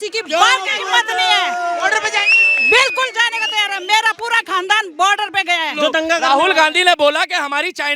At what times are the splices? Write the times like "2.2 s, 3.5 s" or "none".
5.7 s